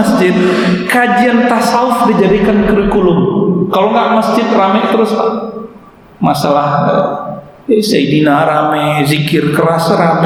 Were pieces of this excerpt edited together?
no; 0 cuts

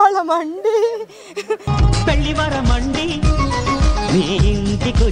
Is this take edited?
no; 0 cuts

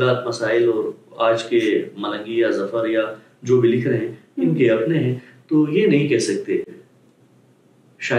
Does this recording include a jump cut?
no; 0 cuts

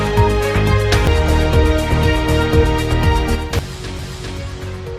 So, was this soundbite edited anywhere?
yes; 1 cut; at 1.0 s

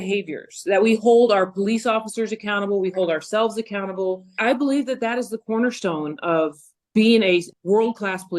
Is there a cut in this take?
yes; 3 cuts; at 4.4 s, 6.9 s, 7.5 s

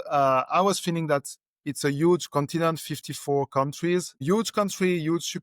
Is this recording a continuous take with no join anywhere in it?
no; 1 cut; at 4.2 s

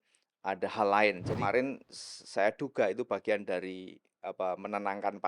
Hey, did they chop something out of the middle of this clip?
yes; 1 cut; at 1.4 s

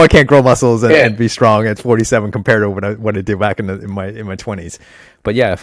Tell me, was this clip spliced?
no; 0 cuts

